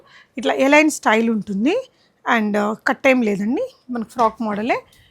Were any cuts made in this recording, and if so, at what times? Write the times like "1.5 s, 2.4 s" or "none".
none